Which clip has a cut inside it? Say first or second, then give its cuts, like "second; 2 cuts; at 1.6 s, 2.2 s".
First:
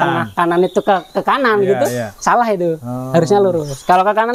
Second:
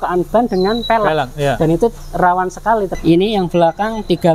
second; 1 cut; at 2.9 s